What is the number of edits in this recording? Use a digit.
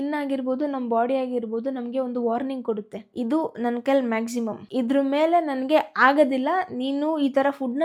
0